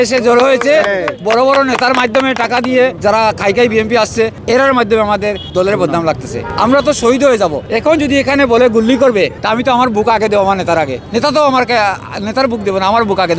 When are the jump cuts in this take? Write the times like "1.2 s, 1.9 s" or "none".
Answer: 3.0 s, 4.4 s, 5.4 s, 6.4 s, 7.7 s, 9.4 s, 11.0 s